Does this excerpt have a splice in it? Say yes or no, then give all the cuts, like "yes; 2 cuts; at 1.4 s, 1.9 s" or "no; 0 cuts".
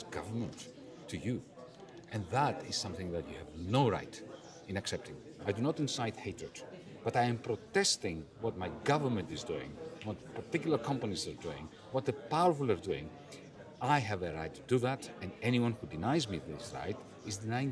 yes; 1 cut; at 5.4 s